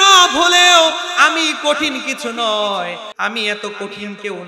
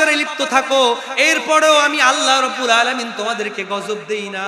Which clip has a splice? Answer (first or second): first